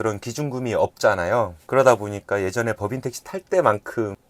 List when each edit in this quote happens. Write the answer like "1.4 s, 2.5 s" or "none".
none